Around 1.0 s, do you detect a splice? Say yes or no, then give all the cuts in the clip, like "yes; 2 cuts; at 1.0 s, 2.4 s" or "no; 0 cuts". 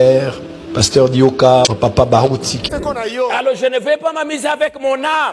no; 1 cut; at 2.7 s